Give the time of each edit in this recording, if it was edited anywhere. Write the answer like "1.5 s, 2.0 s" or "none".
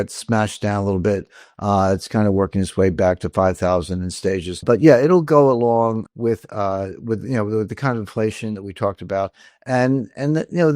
4.6 s, 6.1 s